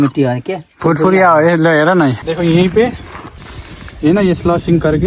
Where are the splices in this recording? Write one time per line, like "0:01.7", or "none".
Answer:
0:02.2